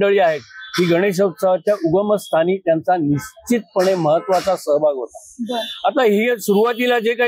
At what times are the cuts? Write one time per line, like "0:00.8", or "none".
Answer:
none